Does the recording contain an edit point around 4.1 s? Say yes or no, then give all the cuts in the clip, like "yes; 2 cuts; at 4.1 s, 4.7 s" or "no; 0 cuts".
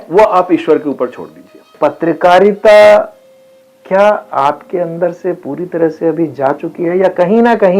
no; 1 cut; at 1.7 s